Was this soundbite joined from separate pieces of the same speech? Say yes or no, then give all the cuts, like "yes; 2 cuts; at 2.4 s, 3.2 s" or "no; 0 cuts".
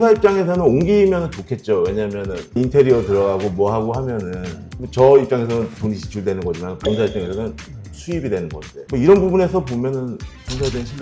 yes; 1 cut; at 8.7 s